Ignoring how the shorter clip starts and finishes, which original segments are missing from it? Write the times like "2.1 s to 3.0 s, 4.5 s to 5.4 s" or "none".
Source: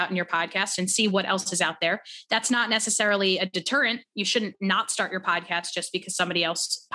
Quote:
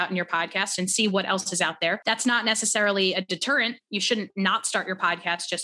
2.0 s to 2.2 s